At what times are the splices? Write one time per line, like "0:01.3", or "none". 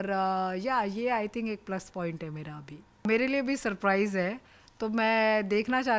0:03.0